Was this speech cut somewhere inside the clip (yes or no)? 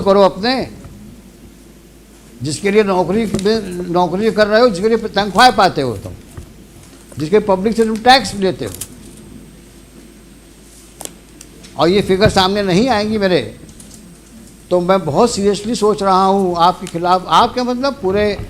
no